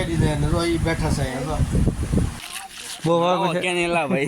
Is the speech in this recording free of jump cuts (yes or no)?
no